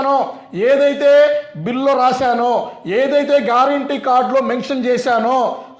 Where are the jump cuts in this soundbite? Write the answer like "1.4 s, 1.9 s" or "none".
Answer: none